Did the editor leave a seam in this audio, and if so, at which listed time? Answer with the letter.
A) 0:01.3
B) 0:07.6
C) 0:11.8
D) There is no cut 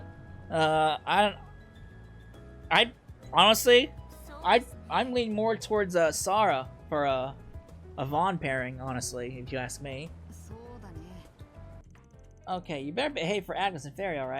C